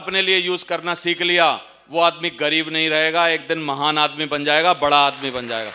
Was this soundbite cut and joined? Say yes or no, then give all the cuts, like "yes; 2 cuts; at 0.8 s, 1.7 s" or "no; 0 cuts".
no; 0 cuts